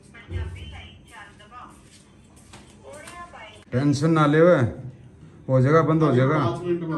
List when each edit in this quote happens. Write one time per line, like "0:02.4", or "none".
none